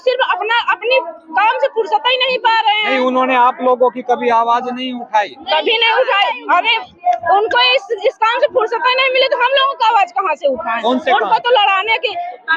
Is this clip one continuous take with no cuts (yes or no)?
yes